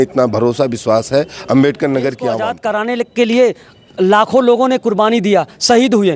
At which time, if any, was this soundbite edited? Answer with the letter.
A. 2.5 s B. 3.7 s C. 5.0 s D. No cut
A